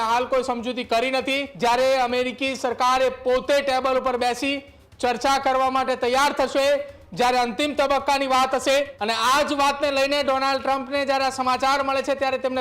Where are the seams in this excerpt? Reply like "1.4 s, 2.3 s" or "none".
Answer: 1.5 s, 9.0 s

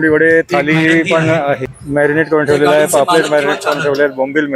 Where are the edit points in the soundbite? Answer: 1.7 s

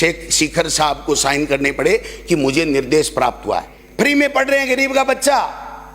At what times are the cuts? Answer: 3.8 s

